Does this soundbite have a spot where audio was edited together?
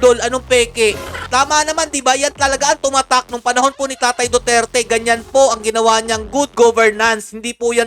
yes; 1 cut; at 1.1 s

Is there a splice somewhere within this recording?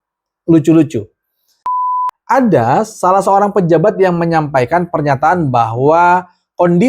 yes; 1 cut; at 1.8 s

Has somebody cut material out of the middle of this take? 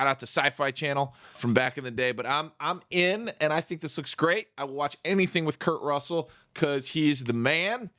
yes; 1 cut; at 1.4 s

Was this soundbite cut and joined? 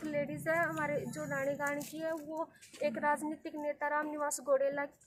no; 0 cuts

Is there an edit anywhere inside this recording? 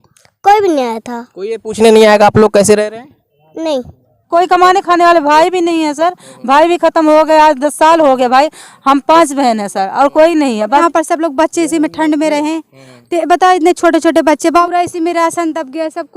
yes; 3 cuts; at 4.3 s, 10.8 s, 14.6 s

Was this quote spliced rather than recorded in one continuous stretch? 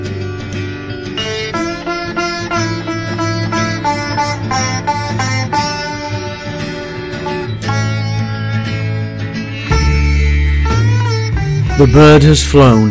yes; 1 cut; at 11.7 s

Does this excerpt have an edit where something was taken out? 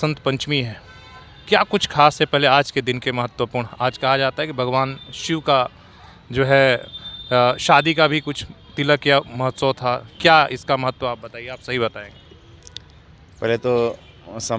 no; 0 cuts

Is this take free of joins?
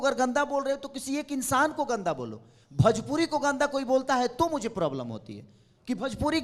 yes; 0 cuts

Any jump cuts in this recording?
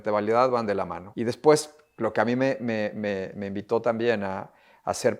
yes; 1 cut; at 1.0 s

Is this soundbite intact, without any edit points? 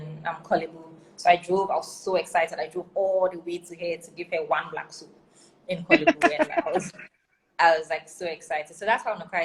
yes; 0 cuts

